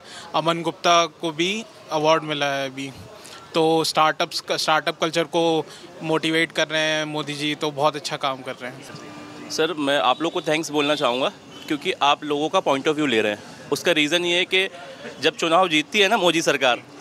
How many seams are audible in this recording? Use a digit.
1